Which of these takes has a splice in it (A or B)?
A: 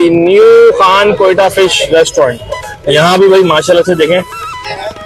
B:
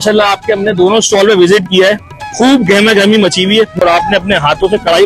B